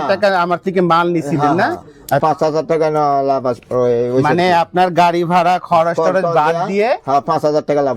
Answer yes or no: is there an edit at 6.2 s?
no